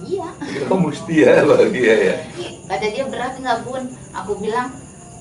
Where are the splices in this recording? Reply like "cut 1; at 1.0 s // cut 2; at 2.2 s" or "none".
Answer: cut 1; at 2.5 s